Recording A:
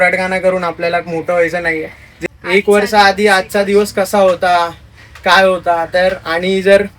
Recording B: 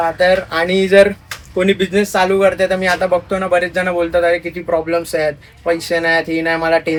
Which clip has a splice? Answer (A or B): A